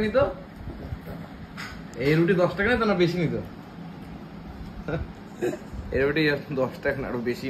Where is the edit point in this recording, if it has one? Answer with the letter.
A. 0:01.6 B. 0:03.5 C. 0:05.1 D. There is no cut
D